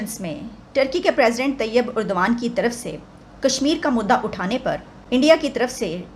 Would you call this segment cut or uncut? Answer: cut